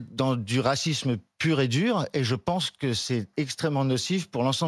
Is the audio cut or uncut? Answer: uncut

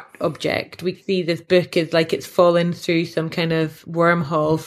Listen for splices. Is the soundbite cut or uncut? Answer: cut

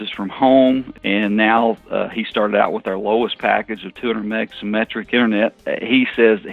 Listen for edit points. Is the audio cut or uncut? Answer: cut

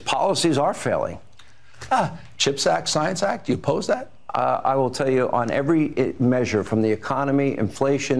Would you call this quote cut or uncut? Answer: uncut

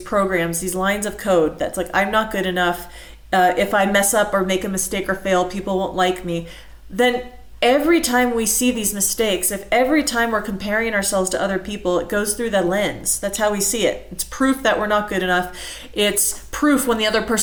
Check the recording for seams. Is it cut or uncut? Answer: uncut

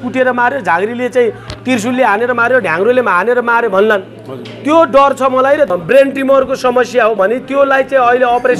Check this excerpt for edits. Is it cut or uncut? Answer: cut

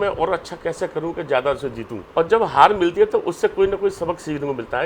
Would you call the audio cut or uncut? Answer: cut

